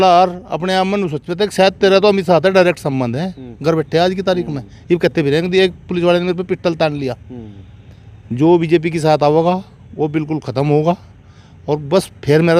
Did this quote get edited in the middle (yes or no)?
no